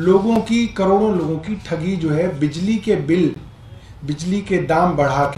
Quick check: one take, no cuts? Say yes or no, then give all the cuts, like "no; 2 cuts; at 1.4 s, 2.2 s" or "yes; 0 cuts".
yes; 0 cuts